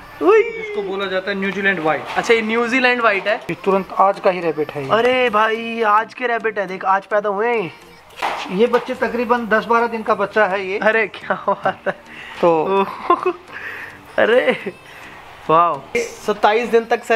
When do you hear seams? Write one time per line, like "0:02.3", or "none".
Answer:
0:03.5
0:08.1
0:15.8